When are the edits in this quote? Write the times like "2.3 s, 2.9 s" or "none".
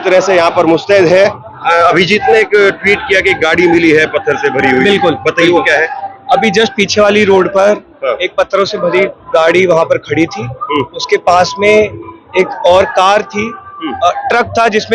1.5 s